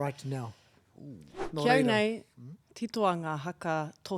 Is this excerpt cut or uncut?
cut